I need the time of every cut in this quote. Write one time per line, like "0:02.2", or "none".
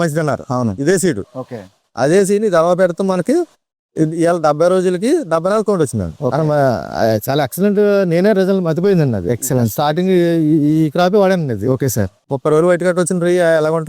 0:12.2